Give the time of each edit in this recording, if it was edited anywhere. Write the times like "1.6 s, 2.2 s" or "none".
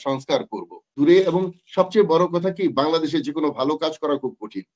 0.9 s